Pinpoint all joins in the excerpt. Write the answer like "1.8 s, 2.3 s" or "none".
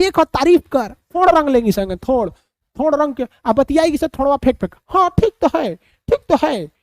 1.0 s